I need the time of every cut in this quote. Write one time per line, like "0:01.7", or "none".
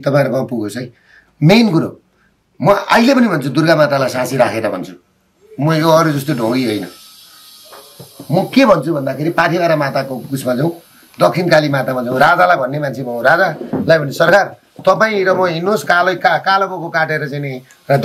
none

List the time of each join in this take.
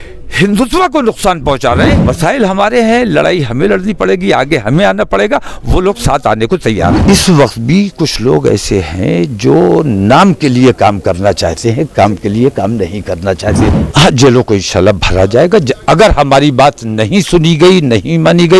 0:01.9
0:07.0
0:13.6

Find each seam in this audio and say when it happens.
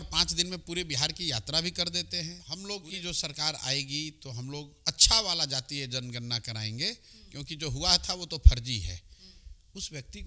0:02.5

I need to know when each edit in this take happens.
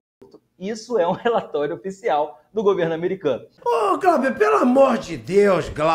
0:03.5

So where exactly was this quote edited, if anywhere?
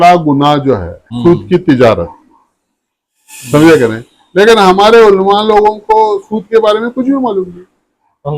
0:01.1

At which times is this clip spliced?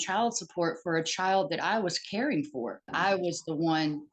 0:02.9

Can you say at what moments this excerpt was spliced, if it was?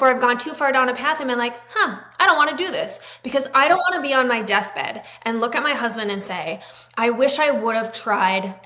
none

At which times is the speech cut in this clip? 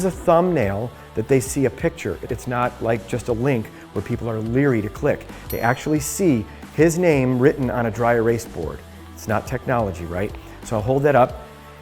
0:02.3

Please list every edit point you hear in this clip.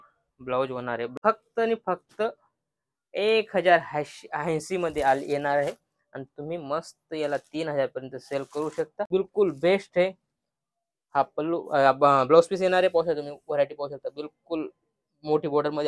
0:01.1
0:09.1

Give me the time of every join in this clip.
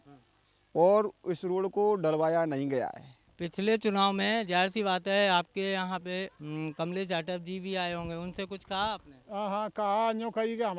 0:03.4

